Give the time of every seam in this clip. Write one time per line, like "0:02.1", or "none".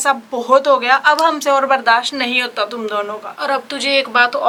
none